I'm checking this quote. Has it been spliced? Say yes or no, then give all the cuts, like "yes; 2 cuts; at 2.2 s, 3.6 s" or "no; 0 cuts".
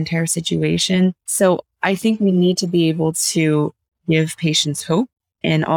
yes; 1 cut; at 1.2 s